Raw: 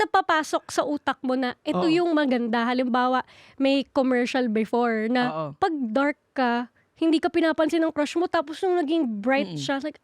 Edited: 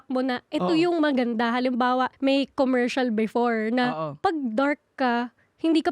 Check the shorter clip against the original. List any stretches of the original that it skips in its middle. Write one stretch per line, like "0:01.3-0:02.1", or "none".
0:03.3-0:03.5